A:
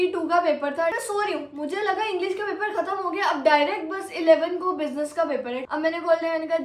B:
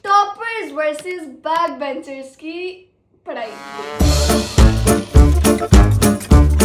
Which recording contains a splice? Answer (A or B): A